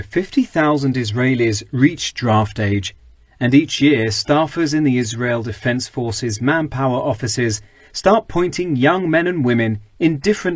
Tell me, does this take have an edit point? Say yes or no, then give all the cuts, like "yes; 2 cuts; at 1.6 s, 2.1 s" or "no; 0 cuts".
yes; 1 cut; at 3.6 s